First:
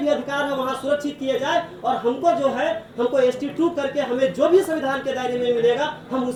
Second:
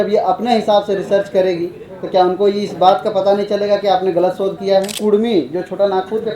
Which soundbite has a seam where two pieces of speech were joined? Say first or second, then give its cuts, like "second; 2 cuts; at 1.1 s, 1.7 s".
second; 1 cut; at 5.0 s